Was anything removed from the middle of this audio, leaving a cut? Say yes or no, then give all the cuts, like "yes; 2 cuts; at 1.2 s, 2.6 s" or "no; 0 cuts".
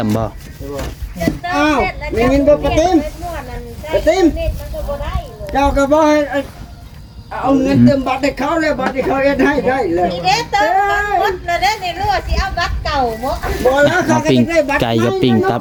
no; 0 cuts